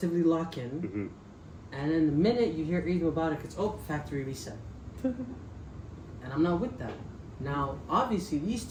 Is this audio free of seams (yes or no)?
yes